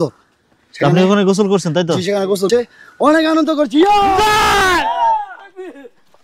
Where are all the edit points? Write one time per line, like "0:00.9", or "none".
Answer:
0:02.5

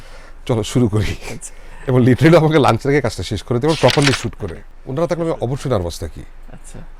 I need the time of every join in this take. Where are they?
0:04.8

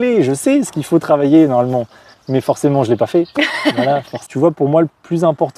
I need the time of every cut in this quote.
0:04.1

